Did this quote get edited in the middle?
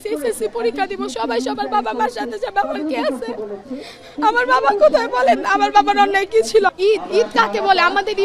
yes; 1 cut; at 6.8 s

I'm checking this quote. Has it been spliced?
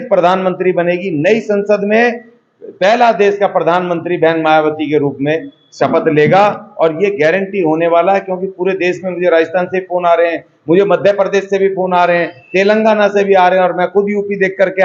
no; 0 cuts

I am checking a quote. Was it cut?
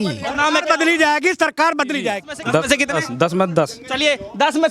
yes; 1 cut; at 2.3 s

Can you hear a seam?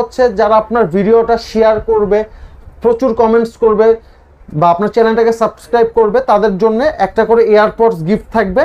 no; 0 cuts

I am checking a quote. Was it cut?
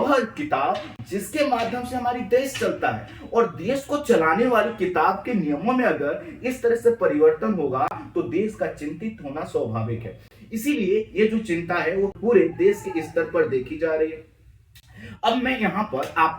no; 0 cuts

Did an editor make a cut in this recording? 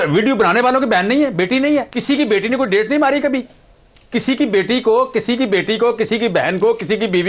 no; 0 cuts

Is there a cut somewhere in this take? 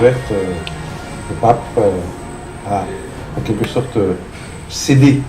yes; 1 cut; at 4.1 s

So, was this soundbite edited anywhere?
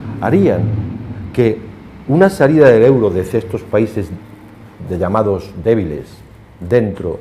no; 0 cuts

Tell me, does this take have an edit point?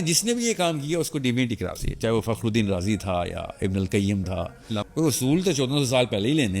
yes; 1 cut; at 4.8 s

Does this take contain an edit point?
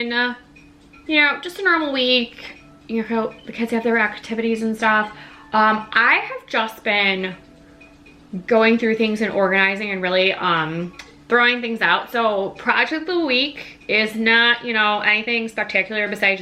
no; 0 cuts

